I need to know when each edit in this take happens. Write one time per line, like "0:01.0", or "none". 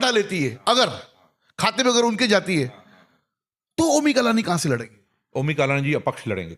none